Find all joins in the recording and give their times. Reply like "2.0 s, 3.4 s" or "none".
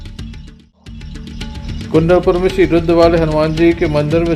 none